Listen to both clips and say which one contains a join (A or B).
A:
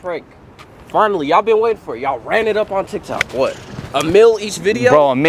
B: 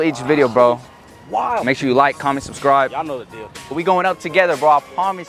B